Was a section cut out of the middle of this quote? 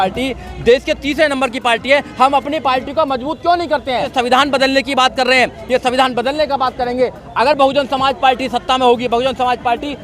yes; 1 cut; at 4.1 s

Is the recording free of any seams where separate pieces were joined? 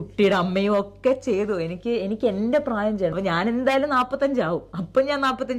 no; 1 cut; at 3.1 s

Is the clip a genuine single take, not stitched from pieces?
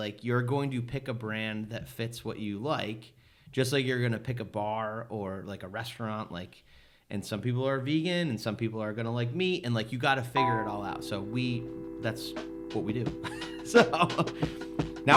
yes; 0 cuts

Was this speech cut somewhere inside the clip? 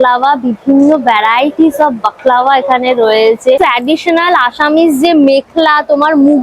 yes; 1 cut; at 3.6 s

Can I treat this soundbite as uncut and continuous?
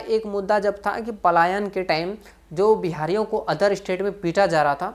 yes; 0 cuts

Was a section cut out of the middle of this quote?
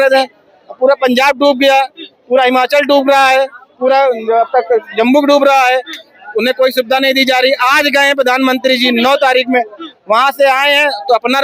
no; 0 cuts

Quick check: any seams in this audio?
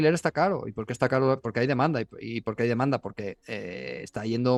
no; 0 cuts

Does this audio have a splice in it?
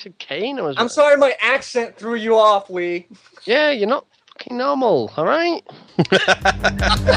no; 0 cuts

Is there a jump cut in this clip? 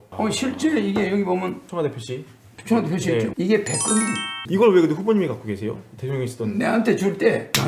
yes; 2 cuts; at 3.3 s, 4.4 s

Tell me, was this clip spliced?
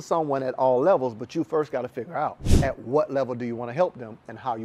yes; 1 cut; at 2.5 s

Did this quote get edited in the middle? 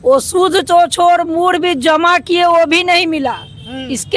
no; 0 cuts

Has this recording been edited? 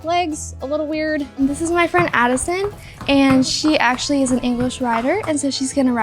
yes; 1 cut; at 1.4 s

